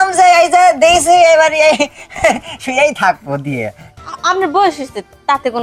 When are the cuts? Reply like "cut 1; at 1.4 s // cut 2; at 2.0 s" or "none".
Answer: cut 1; at 3.9 s